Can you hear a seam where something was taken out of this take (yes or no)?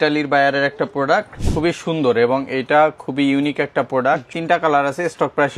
yes